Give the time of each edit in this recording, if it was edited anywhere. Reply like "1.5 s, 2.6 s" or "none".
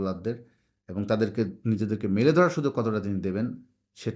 none